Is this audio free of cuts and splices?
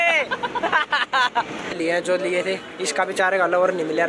no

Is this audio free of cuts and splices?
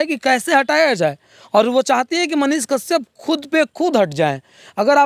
yes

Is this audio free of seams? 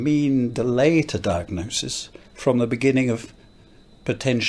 yes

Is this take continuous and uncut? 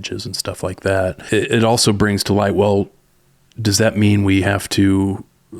no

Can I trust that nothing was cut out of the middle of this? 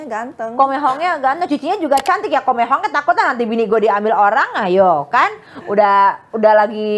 yes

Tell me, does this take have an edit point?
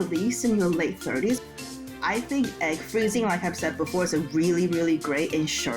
yes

